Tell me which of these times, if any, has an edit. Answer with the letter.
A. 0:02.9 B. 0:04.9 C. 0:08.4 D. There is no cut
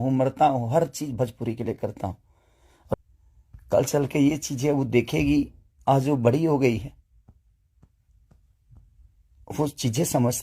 A